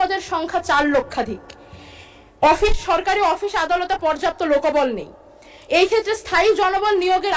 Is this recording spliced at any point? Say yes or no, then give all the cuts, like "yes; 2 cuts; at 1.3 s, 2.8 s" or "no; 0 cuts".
no; 0 cuts